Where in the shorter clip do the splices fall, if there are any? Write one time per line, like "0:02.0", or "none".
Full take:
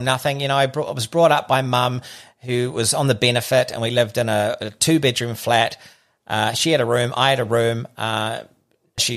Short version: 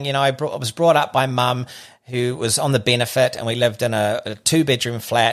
none